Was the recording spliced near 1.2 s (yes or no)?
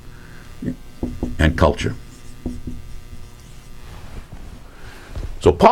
no